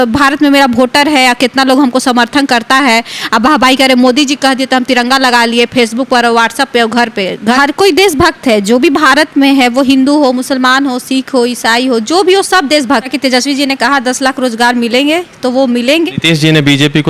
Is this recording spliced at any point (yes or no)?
yes